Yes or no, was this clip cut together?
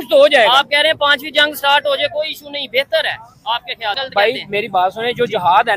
yes